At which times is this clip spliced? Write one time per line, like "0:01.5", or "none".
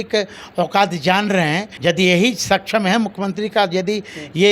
0:01.7

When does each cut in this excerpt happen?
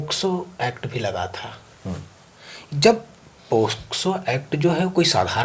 none

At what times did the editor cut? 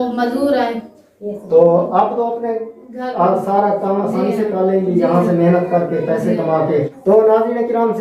0:06.9

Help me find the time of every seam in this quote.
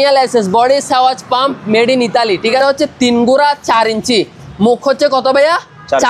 0:02.6

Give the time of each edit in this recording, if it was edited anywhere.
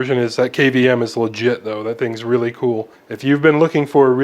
0:02.9

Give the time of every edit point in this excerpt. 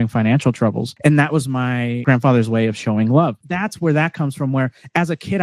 0:00.9
0:02.0
0:03.5

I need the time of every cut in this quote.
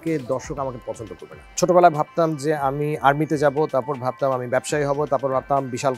0:01.6

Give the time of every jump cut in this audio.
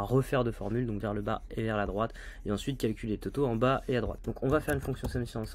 0:04.2

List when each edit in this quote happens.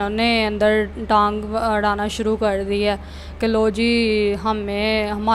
none

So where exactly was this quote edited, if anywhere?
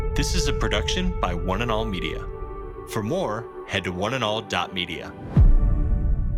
none

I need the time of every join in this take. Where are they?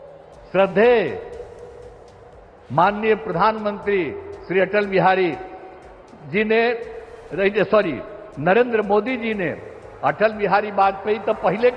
none

